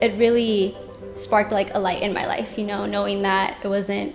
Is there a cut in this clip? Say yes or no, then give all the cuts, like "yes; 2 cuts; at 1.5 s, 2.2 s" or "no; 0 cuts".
no; 0 cuts